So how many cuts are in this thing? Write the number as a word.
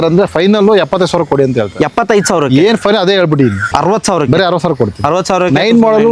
one